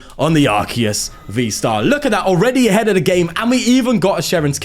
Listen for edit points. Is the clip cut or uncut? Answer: uncut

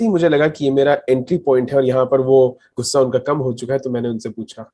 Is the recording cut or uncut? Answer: cut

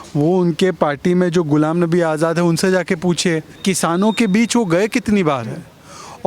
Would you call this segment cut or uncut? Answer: cut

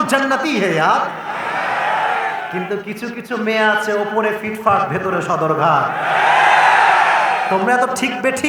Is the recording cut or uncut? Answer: uncut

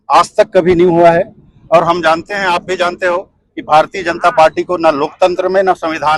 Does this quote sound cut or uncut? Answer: uncut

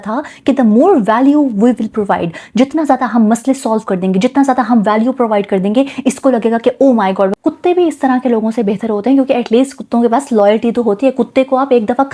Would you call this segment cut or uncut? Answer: cut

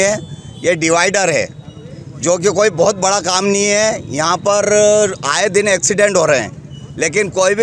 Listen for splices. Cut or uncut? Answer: uncut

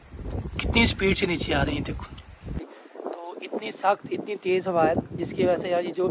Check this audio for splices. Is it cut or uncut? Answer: cut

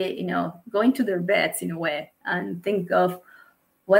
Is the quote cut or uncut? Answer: uncut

